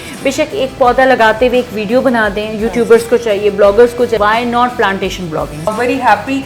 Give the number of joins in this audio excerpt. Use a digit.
2